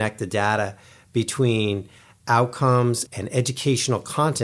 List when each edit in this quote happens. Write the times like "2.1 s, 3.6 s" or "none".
3.1 s